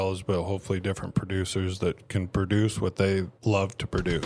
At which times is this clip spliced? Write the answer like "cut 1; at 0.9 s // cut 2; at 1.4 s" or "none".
cut 1; at 3.3 s